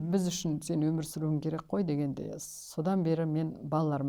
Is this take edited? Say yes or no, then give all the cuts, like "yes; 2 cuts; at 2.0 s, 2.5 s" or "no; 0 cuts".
no; 0 cuts